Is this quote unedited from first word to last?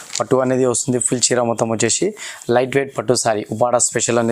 yes; 0 cuts

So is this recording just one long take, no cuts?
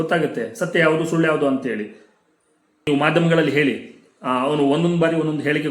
no; 1 cut; at 2.9 s

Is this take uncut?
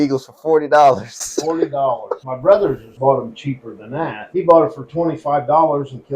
no; 1 cut; at 4.2 s

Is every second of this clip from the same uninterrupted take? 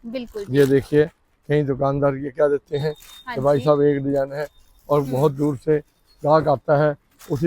yes; 0 cuts

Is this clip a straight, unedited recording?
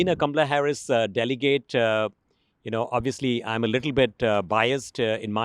yes; 0 cuts

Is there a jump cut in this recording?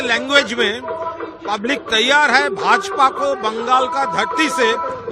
no; 0 cuts

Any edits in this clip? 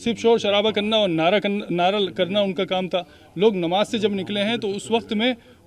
no; 0 cuts

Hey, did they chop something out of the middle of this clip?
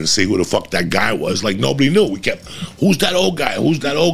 no; 0 cuts

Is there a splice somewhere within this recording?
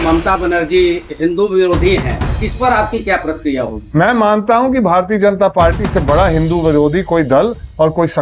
no; 0 cuts

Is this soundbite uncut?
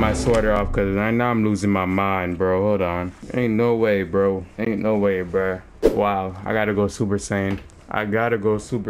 no; 4 cuts; at 3.2 s, 4.5 s, 5.7 s, 7.7 s

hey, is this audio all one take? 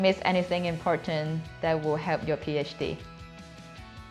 no; 1 cut; at 3.0 s

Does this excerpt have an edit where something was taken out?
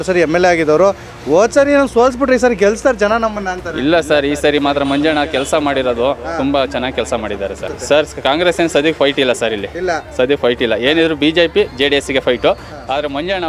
yes; 1 cut; at 7.7 s

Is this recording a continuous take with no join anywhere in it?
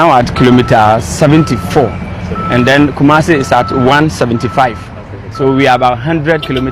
yes; 0 cuts

